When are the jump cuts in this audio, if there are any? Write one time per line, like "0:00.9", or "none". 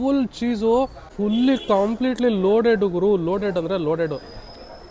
0:01.0